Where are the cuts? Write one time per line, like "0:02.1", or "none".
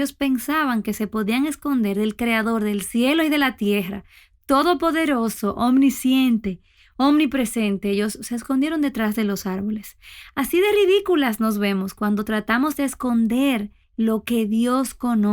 0:13.8